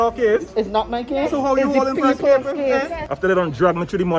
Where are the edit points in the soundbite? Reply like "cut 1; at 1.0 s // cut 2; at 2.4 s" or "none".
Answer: cut 1; at 3.0 s